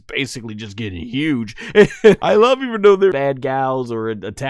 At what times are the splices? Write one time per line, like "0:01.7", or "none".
0:02.2
0:03.2